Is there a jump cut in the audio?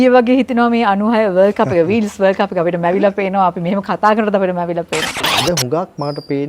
yes; 1 cut; at 5.2 s

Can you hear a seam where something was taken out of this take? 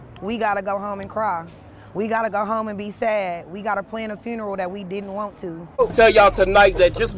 yes; 1 cut; at 5.8 s

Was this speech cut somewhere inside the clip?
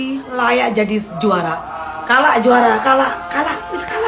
no; 0 cuts

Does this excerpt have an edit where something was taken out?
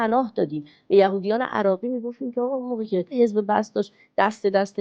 yes; 1 cut; at 3.1 s

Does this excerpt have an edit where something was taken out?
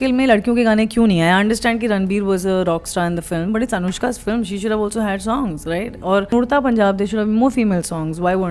yes; 1 cut; at 6.3 s

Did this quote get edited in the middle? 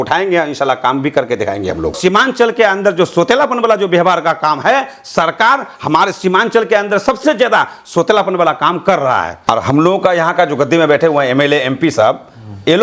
yes; 2 cuts; at 2.0 s, 9.3 s

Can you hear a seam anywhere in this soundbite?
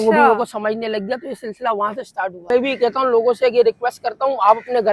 yes; 1 cut; at 2.5 s

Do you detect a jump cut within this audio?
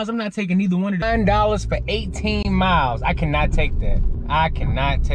yes; 2 cuts; at 1.0 s, 4.1 s

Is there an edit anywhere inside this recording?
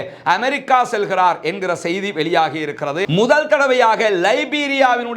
yes; 1 cut; at 3.0 s

